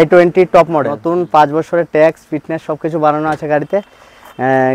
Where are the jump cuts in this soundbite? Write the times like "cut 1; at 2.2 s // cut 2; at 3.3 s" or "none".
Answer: cut 1; at 1.0 s